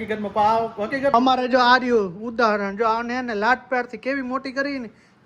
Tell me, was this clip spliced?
yes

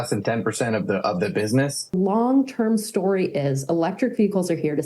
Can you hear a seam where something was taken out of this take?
yes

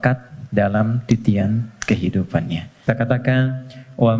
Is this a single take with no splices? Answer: no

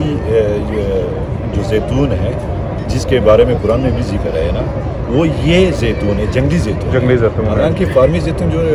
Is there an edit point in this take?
no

